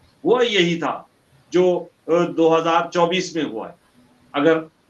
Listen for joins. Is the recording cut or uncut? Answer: uncut